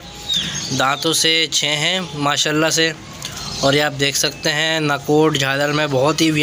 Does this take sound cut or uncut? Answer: uncut